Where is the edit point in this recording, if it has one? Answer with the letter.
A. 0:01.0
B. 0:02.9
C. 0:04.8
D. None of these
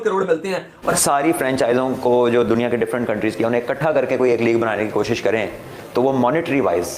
A